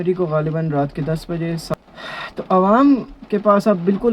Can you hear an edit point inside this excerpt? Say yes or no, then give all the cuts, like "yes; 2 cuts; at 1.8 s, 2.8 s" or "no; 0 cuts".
yes; 1 cut; at 1.7 s